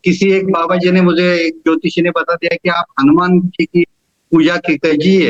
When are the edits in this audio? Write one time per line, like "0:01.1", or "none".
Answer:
none